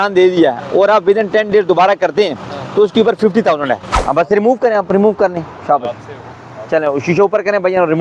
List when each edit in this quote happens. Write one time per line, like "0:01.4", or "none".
0:03.9